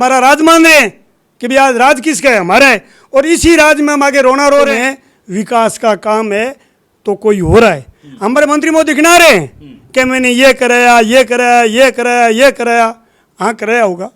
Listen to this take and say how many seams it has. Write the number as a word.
one